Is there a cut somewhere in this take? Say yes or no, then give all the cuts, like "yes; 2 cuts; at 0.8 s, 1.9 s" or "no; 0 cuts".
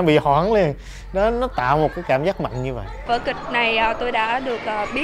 no; 0 cuts